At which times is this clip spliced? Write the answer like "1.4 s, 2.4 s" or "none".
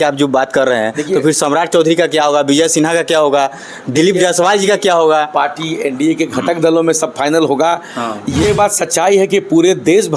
8.4 s